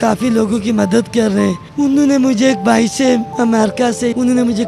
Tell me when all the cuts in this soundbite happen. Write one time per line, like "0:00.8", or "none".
0:01.6
0:03.6